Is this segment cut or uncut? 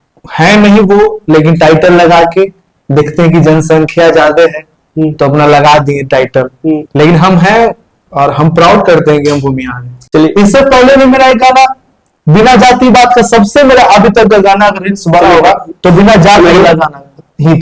cut